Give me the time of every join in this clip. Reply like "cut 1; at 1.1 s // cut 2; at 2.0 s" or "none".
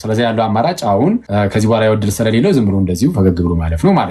cut 1; at 1.3 s

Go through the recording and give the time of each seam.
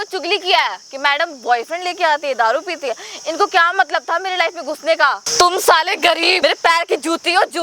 cut 1; at 5.3 s // cut 2; at 6.4 s

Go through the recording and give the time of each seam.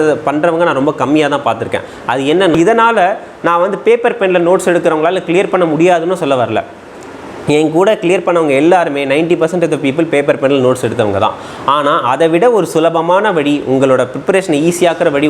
cut 1; at 2.6 s

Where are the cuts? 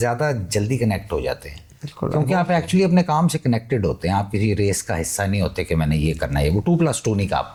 none

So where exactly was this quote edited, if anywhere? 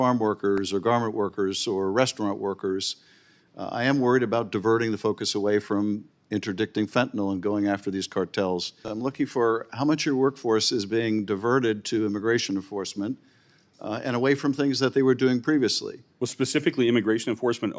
cut 1; at 8.9 s

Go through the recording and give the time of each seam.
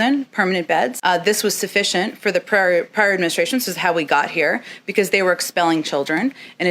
cut 1; at 1.0 s

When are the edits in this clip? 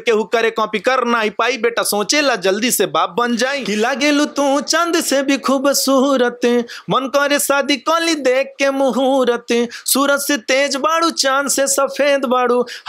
cut 1; at 3.6 s

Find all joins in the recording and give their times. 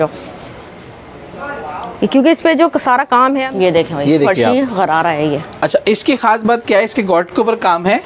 cut 1; at 3.4 s

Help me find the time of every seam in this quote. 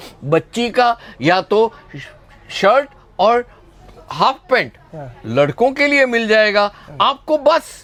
none

